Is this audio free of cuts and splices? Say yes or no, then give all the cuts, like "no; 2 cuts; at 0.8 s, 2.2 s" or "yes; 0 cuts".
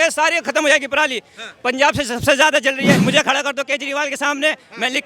no; 1 cut; at 3.0 s